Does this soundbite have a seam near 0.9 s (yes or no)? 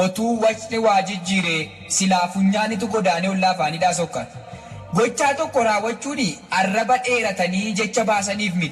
yes